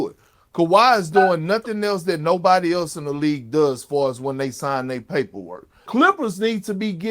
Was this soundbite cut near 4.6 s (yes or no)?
no